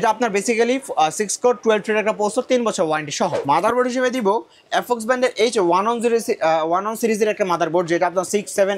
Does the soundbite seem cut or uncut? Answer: cut